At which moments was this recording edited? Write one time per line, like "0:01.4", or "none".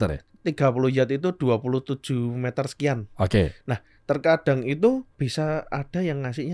0:05.2